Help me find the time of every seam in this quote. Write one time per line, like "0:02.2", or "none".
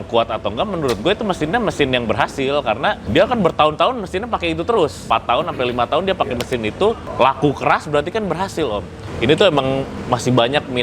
0:03.0
0:05.0
0:07.1
0:09.0
0:09.9